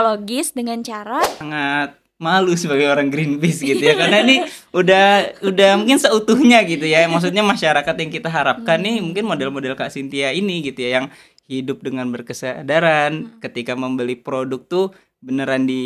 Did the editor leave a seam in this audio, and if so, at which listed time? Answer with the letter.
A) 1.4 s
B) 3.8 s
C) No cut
A